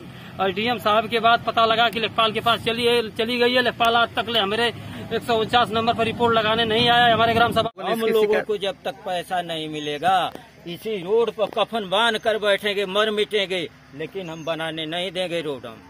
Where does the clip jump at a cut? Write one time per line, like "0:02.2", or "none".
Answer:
0:07.7